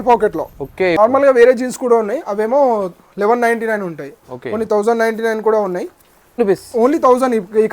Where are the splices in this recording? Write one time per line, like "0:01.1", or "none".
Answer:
0:01.0
0:06.4